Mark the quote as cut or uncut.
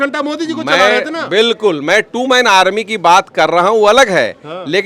uncut